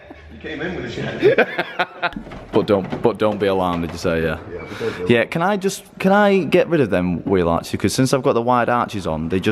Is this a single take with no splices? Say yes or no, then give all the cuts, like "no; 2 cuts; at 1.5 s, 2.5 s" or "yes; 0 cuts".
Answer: yes; 0 cuts